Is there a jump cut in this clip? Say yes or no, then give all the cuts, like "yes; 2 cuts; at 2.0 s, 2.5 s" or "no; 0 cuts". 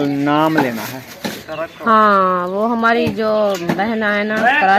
no; 0 cuts